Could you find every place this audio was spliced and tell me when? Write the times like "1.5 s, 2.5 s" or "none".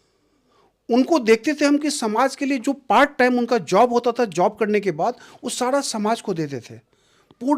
none